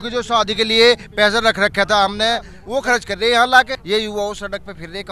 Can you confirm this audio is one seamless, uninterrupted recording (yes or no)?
no